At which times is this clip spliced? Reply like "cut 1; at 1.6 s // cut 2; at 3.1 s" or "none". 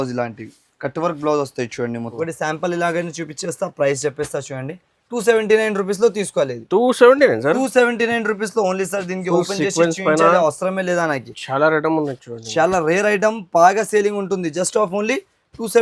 cut 1; at 2.1 s